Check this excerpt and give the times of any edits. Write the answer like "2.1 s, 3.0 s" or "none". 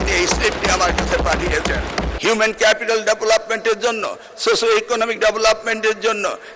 2.1 s

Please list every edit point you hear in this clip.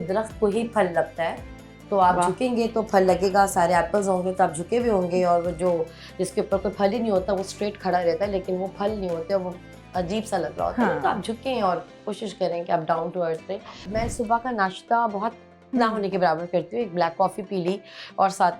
13.9 s

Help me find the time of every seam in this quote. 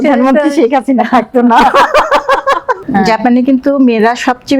2.8 s

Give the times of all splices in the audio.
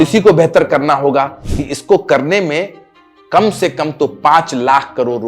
1.4 s

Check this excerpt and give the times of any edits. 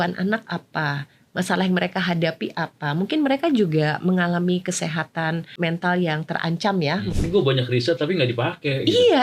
5.5 s, 7.1 s

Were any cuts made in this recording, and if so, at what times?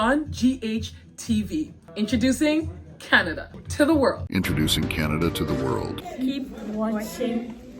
1.8 s, 4.2 s, 6.0 s

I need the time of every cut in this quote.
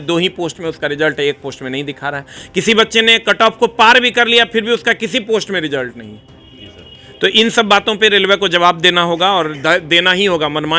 none

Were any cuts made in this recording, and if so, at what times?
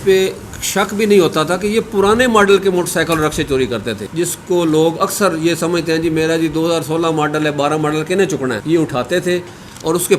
4.0 s, 8.6 s

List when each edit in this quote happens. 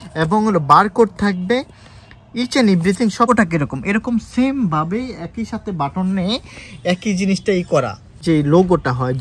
3.3 s, 8.2 s

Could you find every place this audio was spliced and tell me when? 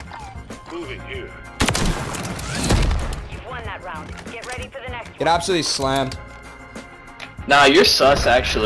none

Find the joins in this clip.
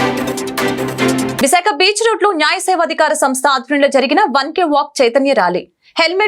1.3 s

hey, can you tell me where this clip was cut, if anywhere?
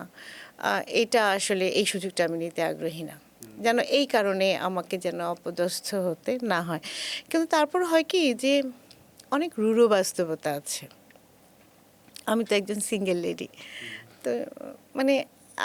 none

